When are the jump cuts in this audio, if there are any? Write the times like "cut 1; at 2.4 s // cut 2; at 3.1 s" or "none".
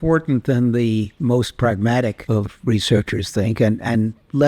cut 1; at 1.1 s // cut 2; at 2.2 s